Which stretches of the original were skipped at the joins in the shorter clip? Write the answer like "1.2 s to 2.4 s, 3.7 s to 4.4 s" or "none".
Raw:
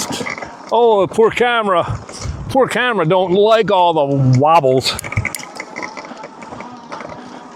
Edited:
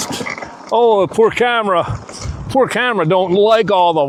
none

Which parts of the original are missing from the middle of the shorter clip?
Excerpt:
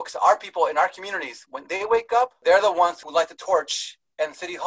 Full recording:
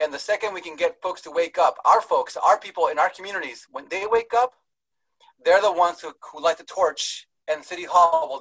4.6 s to 5.4 s, 6.0 s to 6.3 s

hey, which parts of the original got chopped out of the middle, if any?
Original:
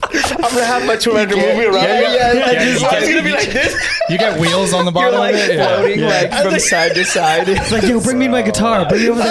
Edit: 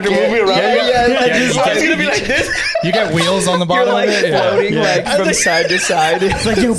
none

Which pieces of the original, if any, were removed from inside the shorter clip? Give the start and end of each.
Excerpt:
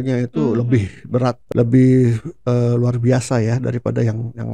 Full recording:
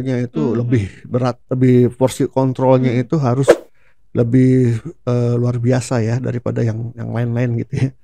1.4 s to 4.0 s

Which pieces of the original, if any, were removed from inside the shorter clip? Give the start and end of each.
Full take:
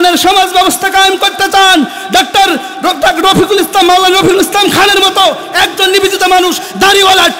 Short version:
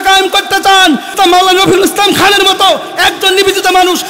2.0 s to 3.7 s

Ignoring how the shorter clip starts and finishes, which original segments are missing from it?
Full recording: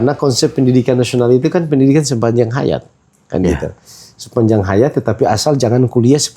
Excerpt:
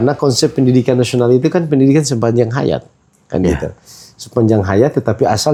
none

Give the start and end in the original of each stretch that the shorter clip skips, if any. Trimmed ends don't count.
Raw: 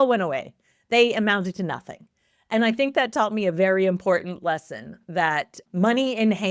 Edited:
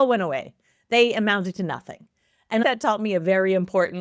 2.6 s to 3.0 s

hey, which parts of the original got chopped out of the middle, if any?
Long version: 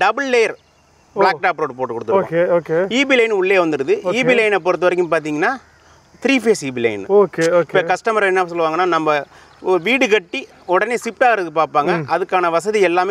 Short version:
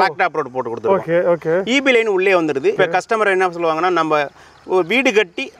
4.0 s to 7.7 s

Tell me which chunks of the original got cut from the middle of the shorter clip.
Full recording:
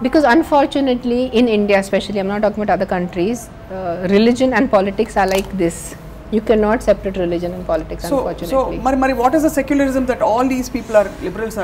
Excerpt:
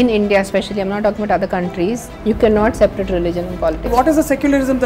3.5 s to 6.2 s, 8.0 s to 9.2 s

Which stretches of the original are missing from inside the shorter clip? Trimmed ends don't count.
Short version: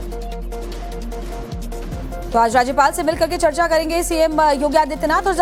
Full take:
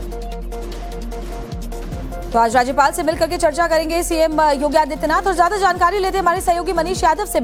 none

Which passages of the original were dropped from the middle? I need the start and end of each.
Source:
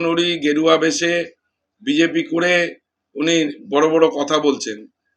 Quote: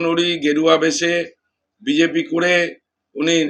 none

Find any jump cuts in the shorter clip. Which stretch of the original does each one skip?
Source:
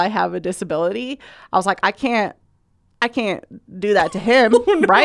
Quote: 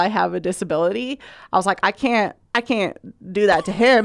2.4 s to 2.9 s

